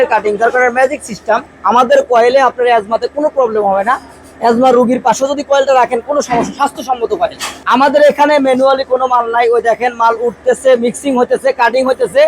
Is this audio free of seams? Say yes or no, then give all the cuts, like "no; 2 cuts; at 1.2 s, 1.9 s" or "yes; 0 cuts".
no; 2 cuts; at 1.4 s, 7.6 s